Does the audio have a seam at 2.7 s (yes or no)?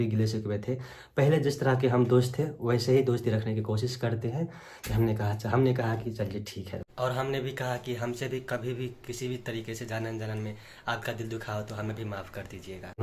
no